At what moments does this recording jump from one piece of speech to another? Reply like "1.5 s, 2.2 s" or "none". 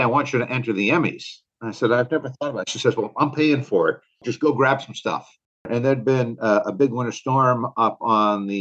4.3 s, 5.7 s